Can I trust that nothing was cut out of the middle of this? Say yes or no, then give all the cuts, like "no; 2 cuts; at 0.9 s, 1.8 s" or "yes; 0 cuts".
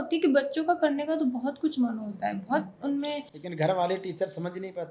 yes; 0 cuts